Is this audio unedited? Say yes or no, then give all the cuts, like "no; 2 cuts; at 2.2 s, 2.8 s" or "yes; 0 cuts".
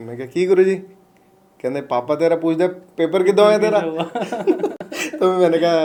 yes; 0 cuts